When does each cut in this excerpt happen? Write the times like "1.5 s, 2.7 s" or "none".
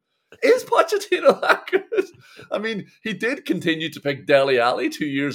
none